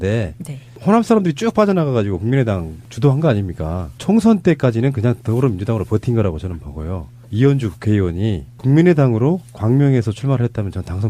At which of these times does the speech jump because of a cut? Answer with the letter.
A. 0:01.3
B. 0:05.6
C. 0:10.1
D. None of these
C